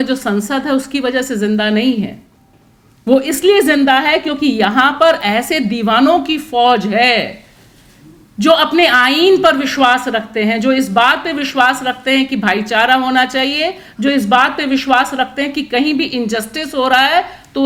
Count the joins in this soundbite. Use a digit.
0